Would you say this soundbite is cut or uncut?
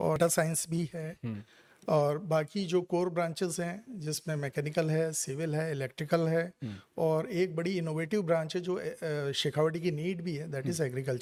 uncut